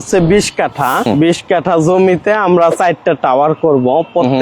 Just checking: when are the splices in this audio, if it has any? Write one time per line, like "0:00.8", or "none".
0:01.1